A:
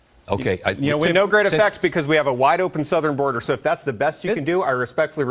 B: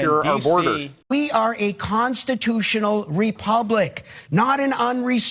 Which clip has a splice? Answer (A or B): B